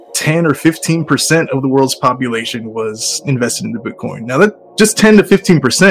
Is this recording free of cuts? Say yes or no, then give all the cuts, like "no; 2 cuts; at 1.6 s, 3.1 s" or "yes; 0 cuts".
yes; 0 cuts